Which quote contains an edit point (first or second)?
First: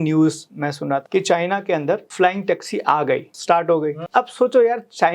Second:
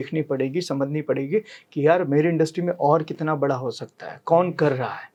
first